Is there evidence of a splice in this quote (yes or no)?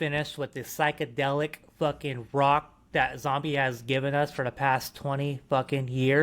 no